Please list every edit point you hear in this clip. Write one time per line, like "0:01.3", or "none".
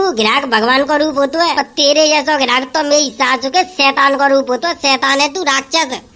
0:01.6